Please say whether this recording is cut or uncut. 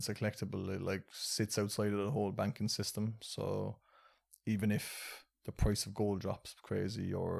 uncut